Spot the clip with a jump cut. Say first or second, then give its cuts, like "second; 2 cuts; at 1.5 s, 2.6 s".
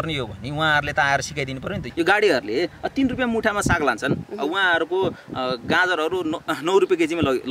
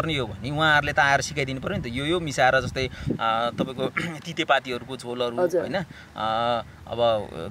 first; 1 cut; at 1.9 s